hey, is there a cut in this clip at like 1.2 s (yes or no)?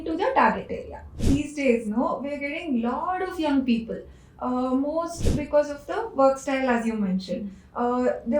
yes